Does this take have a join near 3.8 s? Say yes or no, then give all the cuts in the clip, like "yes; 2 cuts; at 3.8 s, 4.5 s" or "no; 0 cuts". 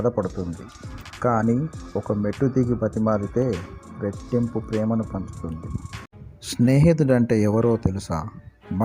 no; 1 cut; at 6.0 s